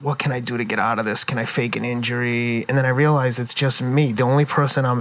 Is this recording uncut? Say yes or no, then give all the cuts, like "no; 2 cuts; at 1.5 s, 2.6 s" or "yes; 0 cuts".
yes; 0 cuts